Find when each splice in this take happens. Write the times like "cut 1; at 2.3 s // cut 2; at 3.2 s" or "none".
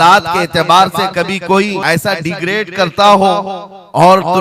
cut 1; at 1.8 s

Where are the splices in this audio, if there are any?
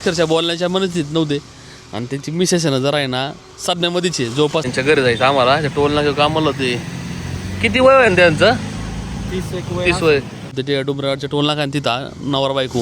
cut 1; at 4.6 s // cut 2; at 10.5 s

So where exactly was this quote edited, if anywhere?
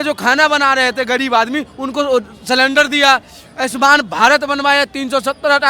none

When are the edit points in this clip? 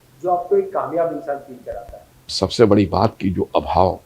cut 1; at 2.3 s

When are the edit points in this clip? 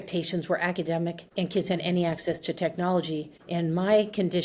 none

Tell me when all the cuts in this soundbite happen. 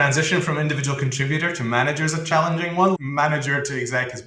cut 1; at 3.0 s

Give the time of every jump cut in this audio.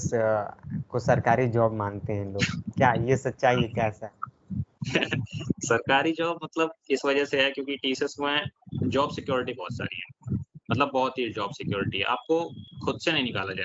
none

